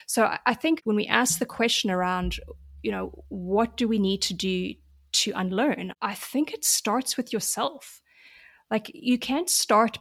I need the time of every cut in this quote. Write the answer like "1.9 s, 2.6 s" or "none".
1.0 s, 5.9 s